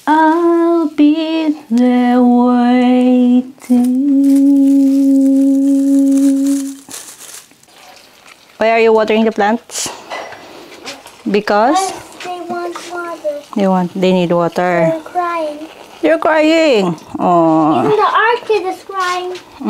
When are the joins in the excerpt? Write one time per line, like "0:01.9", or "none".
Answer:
0:07.8

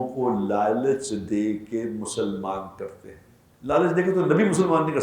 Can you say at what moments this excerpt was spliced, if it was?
0:03.5

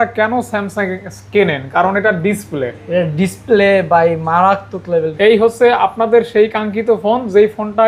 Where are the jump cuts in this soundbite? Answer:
0:05.1

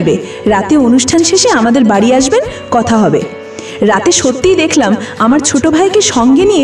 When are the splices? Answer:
0:03.3

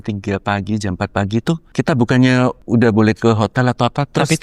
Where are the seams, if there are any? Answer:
0:01.6
0:02.6

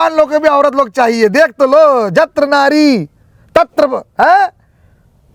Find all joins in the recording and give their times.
none

